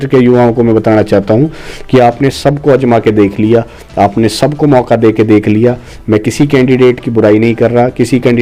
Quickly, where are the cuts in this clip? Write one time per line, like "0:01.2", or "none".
none